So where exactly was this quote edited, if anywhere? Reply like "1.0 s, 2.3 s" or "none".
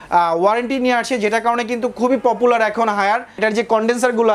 3.4 s